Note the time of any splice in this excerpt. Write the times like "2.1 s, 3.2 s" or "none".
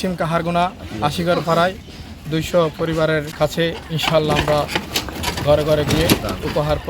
3.3 s